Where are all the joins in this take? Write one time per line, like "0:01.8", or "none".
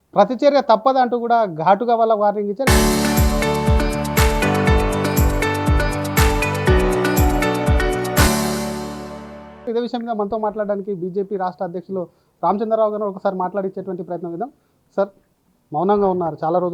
0:02.6
0:09.7